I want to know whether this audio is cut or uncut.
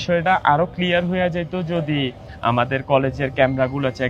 uncut